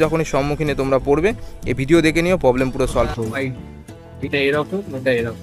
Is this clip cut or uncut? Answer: cut